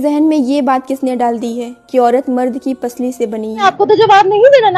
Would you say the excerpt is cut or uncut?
cut